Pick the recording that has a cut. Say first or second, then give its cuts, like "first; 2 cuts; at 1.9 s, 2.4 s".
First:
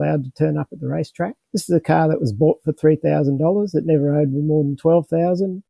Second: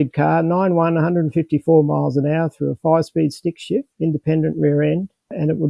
second; 1 cut; at 3.9 s